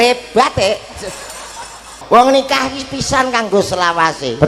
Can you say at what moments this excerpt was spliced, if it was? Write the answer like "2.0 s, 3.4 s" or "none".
2.0 s